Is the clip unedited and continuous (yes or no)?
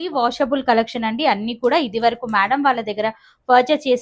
yes